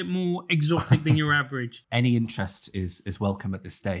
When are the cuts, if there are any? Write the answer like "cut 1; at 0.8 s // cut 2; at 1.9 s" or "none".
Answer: cut 1; at 1.7 s

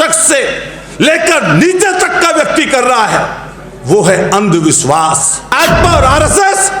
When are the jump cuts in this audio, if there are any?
cut 1; at 5.5 s

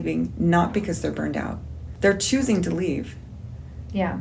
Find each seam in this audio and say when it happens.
cut 1; at 1.8 s

